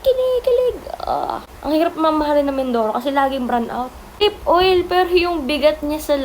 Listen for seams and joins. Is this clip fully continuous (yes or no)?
no